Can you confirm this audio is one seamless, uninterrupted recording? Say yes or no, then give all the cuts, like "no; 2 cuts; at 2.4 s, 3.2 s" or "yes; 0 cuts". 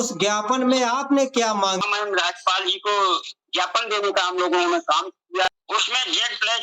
no; 2 cuts; at 1.8 s, 5.4 s